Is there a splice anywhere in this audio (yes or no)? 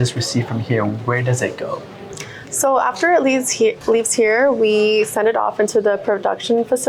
no